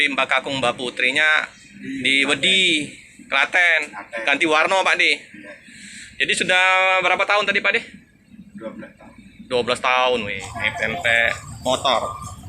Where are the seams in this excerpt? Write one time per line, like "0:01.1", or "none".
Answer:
0:10.4